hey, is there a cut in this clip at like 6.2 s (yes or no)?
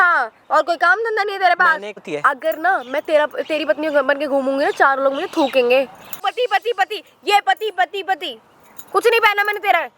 yes